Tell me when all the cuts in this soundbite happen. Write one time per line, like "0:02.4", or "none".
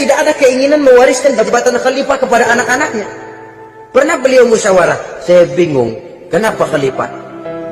none